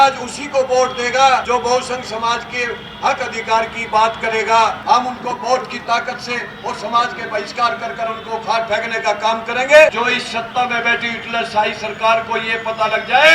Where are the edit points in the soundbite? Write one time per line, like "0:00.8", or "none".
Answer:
0:01.4
0:04.8
0:09.9